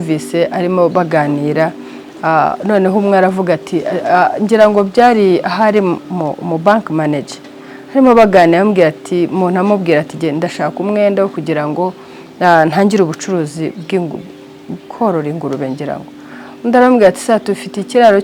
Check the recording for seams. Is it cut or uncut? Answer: uncut